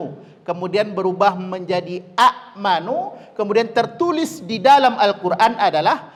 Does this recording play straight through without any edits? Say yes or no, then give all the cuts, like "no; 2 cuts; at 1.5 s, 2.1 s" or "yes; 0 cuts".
yes; 0 cuts